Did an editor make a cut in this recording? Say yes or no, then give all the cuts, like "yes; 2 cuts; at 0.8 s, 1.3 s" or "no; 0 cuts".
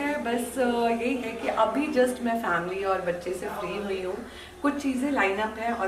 no; 0 cuts